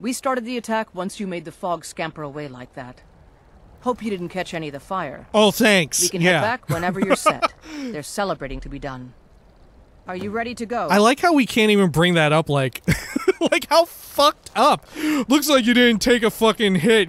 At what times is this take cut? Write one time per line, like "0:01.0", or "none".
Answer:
0:10.9
0:15.2